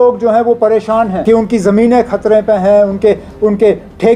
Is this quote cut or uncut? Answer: cut